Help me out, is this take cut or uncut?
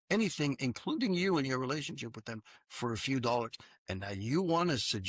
uncut